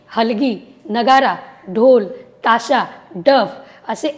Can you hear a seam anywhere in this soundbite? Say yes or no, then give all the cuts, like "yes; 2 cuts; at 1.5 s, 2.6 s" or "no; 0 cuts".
no; 0 cuts